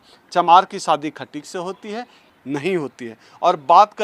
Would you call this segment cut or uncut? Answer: cut